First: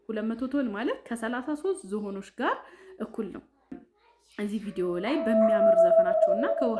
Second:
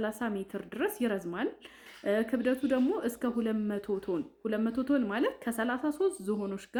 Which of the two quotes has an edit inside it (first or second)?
first